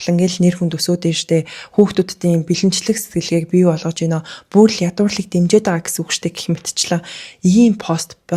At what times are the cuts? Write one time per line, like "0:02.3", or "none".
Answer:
none